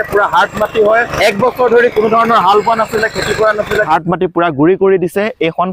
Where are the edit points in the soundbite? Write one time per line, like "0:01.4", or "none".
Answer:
0:01.1
0:03.9

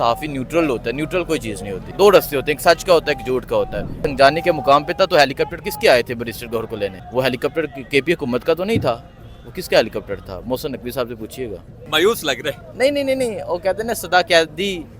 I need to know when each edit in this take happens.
0:01.8
0:04.1
0:07.0
0:11.8

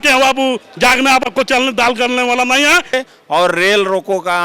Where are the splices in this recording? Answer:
0:02.9

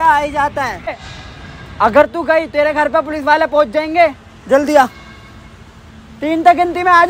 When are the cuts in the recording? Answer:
0:01.0

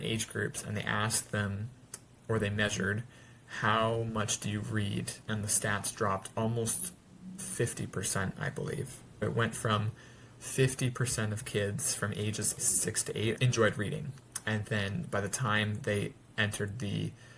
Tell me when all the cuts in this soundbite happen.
0:05.2
0:09.2
0:12.7

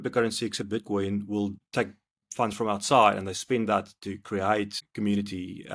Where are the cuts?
0:01.6
0:04.8

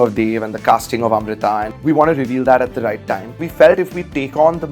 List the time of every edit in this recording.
0:03.4

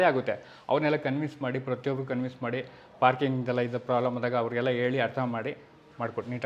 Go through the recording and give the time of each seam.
none

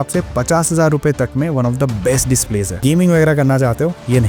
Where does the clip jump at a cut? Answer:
0:02.8

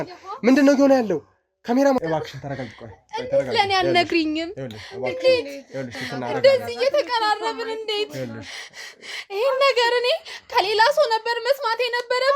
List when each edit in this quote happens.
0:02.0

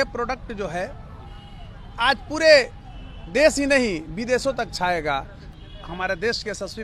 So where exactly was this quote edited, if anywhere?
0:05.4

